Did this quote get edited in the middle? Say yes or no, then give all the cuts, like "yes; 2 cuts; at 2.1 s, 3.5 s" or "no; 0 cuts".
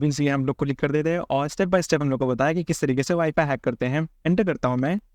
yes; 1 cut; at 4.1 s